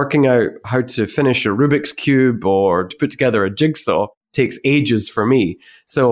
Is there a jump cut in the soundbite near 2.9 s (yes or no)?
yes